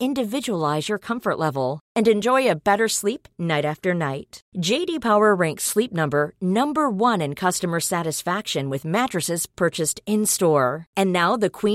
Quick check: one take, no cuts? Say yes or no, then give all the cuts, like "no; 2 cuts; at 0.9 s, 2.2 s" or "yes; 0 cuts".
yes; 0 cuts